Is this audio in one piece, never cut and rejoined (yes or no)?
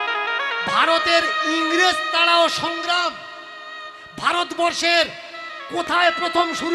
yes